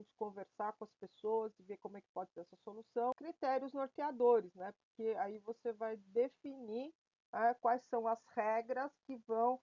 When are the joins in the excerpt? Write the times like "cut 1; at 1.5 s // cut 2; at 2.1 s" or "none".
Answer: cut 1; at 3.2 s